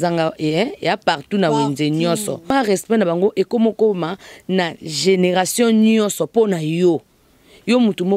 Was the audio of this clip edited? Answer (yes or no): yes